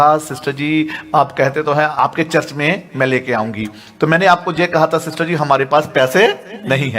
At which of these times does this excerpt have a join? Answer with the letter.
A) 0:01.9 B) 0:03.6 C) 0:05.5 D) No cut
A